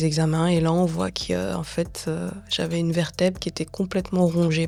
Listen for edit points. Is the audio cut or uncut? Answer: uncut